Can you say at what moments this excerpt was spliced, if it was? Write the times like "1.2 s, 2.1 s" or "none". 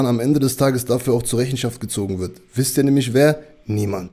none